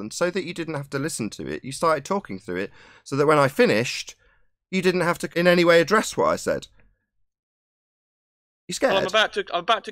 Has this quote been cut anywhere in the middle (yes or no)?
yes